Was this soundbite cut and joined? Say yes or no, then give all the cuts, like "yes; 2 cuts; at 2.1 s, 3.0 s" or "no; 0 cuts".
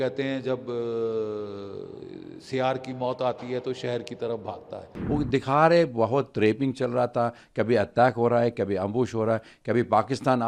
yes; 1 cut; at 4.9 s